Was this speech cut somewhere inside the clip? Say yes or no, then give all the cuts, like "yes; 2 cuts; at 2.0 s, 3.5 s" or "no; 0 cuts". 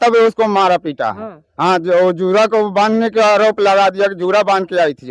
no; 0 cuts